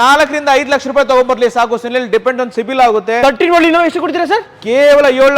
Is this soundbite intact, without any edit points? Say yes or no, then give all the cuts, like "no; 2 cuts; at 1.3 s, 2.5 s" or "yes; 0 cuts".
no; 1 cut; at 3.2 s